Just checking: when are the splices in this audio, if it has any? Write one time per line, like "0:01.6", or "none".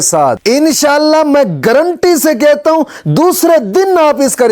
none